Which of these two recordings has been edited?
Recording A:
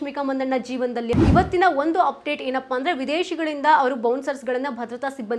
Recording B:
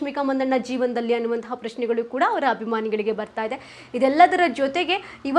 A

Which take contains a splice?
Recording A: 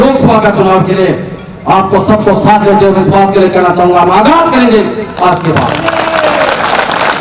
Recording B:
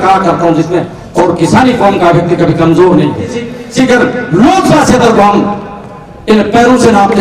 B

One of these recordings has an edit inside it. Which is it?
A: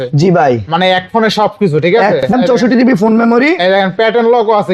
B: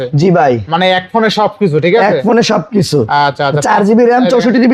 A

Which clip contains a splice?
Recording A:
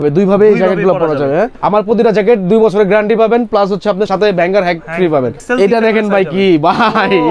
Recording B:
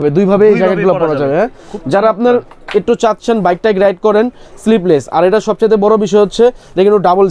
A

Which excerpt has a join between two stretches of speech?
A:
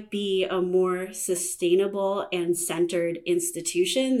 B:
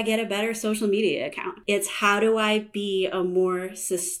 B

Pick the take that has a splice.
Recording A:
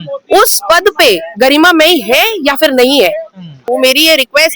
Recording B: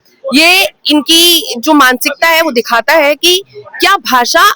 A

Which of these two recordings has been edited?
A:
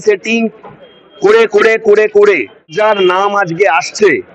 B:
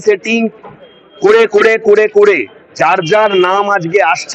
A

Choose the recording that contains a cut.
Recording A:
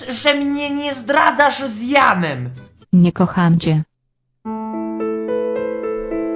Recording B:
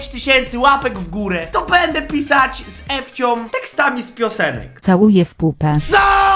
B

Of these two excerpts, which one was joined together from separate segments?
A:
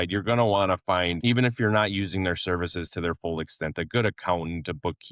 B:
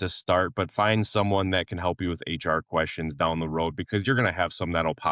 A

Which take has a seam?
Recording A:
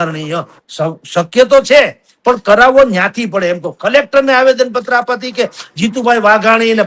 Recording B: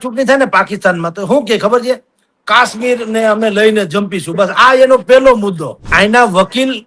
B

